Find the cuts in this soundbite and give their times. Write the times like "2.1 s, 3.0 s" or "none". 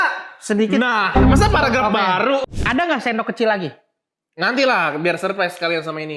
2.5 s